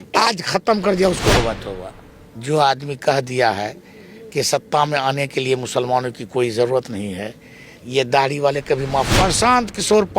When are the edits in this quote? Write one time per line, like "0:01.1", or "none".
0:01.4
0:09.1